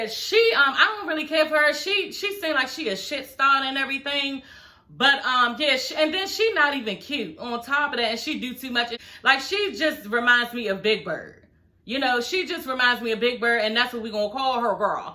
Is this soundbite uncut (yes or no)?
no